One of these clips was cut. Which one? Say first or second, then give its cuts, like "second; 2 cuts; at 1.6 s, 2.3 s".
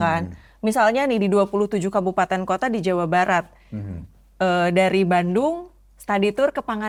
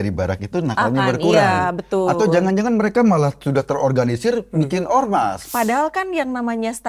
second; 1 cut; at 5.4 s